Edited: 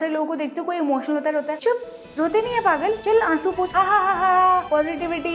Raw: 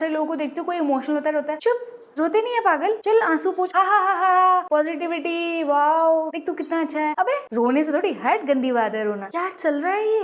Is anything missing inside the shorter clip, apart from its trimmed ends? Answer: no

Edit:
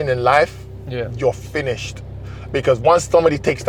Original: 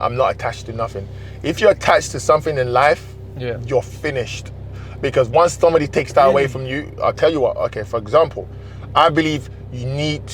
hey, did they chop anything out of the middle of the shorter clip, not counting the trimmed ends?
no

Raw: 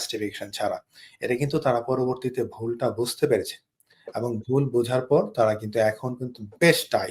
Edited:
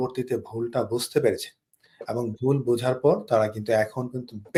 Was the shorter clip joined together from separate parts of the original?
no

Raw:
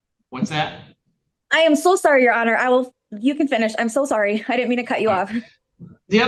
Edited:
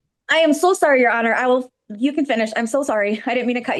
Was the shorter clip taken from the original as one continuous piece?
yes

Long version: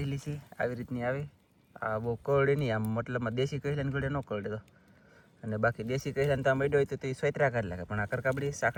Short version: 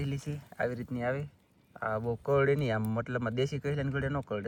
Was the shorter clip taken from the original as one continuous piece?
yes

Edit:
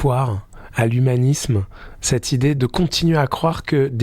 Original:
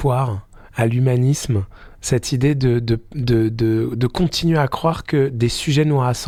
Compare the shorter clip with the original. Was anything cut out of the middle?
yes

